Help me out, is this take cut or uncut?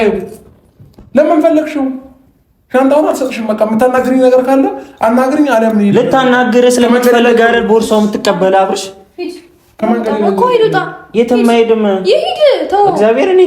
uncut